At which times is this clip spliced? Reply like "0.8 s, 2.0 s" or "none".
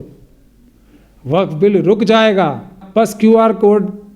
2.8 s